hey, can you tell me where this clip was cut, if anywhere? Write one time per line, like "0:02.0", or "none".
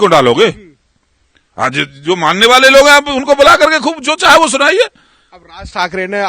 none

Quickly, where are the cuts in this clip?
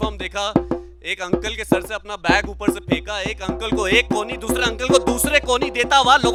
none

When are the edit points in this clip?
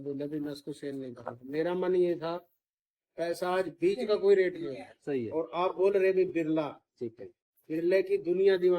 0:05.3

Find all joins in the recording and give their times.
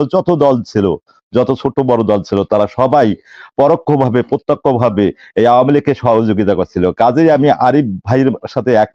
none

